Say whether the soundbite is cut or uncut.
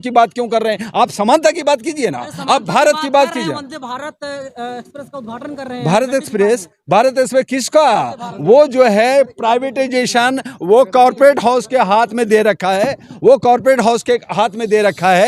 uncut